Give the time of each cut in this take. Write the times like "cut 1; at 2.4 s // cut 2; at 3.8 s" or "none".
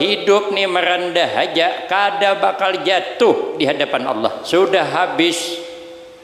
cut 1; at 4.4 s